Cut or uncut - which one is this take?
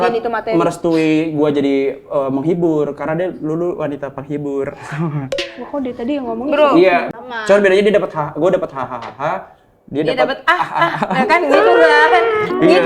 cut